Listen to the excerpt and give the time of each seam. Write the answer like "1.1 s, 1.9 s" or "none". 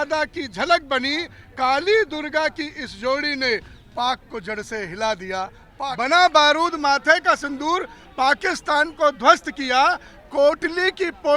5.7 s